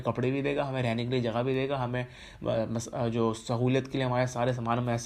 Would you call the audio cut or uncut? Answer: uncut